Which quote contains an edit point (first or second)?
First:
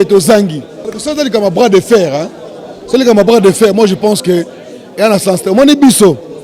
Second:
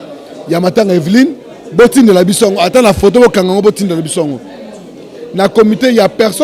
first